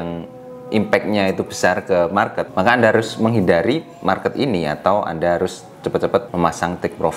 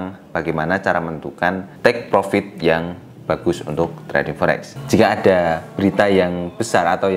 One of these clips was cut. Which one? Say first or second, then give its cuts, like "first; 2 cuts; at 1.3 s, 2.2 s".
second; 1 cut; at 4.7 s